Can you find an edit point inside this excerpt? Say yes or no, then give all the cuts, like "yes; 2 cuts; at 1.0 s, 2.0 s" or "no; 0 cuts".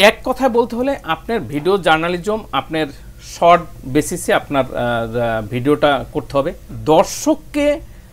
yes; 1 cut; at 6.7 s